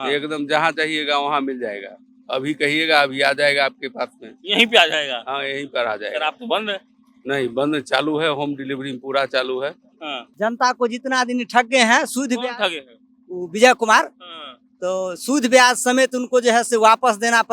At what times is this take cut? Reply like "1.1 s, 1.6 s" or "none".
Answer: 10.2 s